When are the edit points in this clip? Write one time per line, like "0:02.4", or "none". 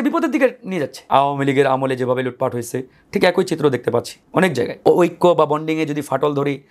0:01.0
0:04.8